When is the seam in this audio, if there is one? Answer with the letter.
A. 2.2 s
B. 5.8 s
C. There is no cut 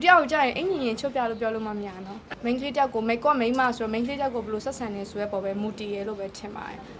A